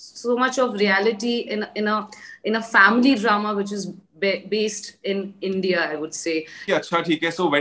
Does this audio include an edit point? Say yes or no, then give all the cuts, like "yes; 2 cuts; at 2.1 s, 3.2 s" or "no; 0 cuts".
yes; 1 cut; at 6.6 s